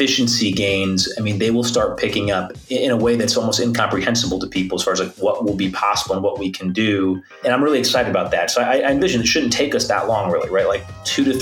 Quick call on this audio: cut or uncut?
cut